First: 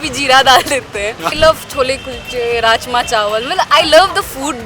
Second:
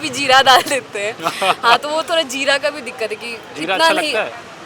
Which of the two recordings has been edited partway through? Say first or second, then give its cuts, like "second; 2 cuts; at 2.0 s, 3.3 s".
first; 1 cut; at 1.3 s